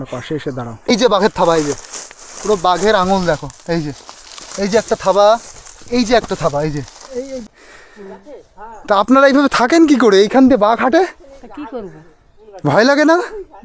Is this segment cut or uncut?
cut